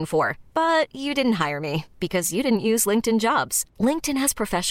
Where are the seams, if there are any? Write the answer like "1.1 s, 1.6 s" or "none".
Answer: none

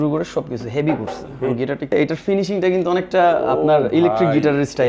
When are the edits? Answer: 1.9 s

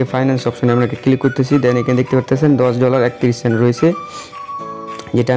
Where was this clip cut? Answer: none

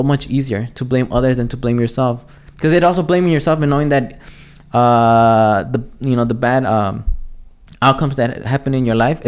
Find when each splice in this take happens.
none

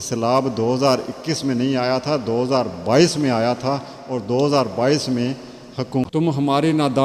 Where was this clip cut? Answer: 6.0 s

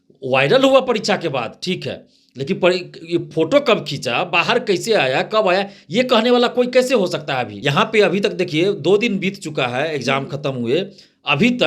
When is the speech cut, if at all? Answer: 7.5 s

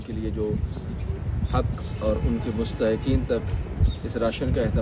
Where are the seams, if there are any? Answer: none

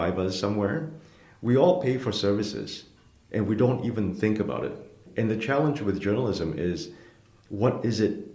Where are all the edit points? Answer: 5.0 s

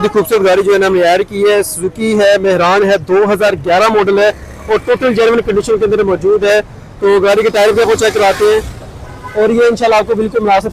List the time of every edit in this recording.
none

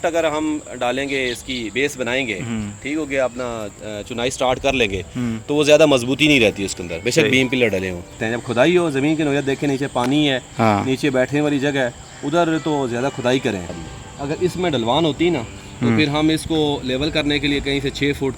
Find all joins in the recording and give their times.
8.1 s, 13.8 s

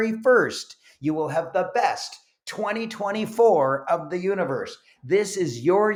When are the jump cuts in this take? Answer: none

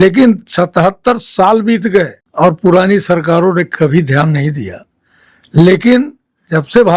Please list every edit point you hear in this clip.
2.2 s

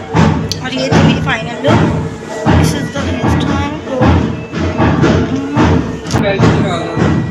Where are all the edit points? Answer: 6.2 s

